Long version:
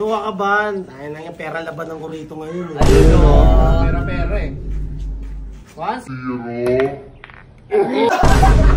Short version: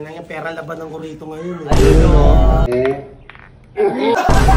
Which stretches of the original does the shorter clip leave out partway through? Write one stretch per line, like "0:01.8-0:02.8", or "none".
0:03.8-0:06.6